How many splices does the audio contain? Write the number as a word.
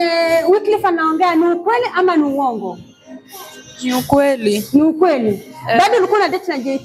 zero